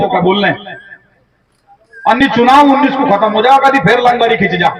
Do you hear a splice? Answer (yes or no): no